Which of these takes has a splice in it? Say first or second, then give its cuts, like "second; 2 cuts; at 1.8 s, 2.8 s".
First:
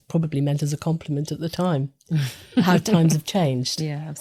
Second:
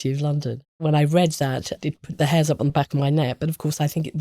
second; 3 cuts; at 0.8 s, 1.7 s, 2.7 s